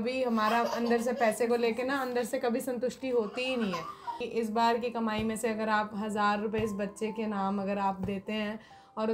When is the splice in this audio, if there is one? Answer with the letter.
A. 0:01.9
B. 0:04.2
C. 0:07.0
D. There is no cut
B